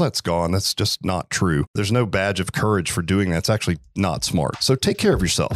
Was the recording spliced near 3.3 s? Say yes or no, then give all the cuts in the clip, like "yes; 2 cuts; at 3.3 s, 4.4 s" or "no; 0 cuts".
no; 2 cuts; at 1.8 s, 4.6 s